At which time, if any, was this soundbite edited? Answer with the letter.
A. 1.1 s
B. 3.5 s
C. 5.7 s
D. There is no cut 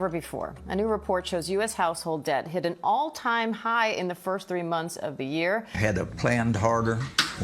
C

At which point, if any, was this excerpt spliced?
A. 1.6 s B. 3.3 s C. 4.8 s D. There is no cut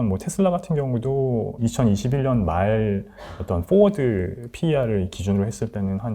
A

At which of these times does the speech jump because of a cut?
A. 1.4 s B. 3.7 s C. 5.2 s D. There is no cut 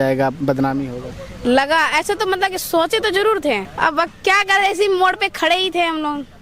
B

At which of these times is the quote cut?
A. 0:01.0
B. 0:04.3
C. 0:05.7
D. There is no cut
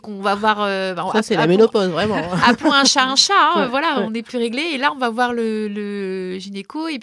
D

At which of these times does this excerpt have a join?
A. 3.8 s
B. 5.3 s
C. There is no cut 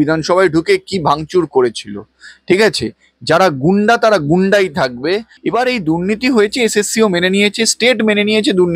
B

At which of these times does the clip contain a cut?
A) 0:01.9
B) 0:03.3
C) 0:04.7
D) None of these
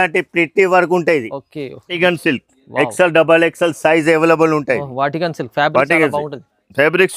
A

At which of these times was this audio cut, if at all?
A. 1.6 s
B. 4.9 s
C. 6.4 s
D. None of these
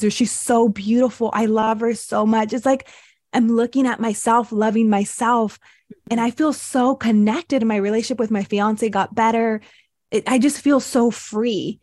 A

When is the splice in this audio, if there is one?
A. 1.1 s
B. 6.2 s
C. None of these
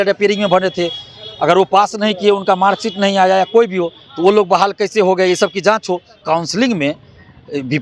B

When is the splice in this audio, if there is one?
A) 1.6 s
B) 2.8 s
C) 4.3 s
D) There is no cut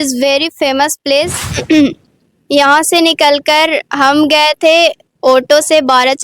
A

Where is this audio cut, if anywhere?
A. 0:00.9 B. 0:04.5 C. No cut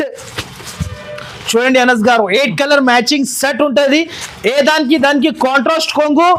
C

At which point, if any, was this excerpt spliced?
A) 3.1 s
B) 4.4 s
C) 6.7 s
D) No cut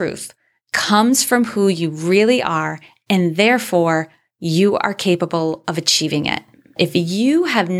C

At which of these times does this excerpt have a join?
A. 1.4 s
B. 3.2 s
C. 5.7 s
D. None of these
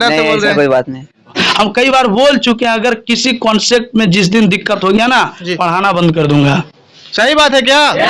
A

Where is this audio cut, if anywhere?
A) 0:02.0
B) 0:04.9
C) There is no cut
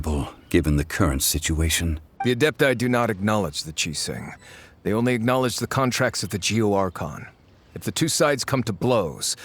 A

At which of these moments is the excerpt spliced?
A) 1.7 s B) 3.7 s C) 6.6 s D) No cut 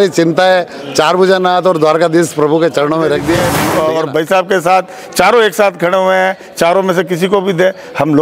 B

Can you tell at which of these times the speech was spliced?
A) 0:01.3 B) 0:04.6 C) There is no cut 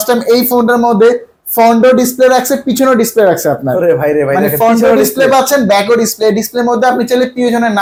C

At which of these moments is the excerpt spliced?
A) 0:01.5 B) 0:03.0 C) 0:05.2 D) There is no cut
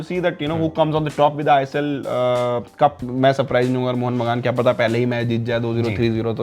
B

